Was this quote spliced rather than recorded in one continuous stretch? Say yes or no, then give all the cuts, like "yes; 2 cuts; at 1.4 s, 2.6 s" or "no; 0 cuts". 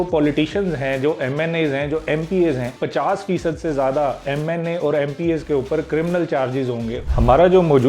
yes; 2 cuts; at 2.7 s, 7.0 s